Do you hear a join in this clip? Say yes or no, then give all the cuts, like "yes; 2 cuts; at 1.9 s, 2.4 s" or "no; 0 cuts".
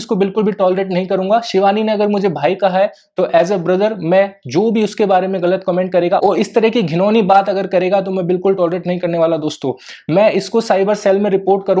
no; 0 cuts